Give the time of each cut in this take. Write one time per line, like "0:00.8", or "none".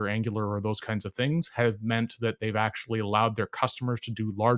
none